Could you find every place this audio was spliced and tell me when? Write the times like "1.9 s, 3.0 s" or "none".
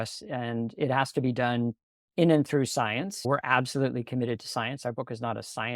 3.2 s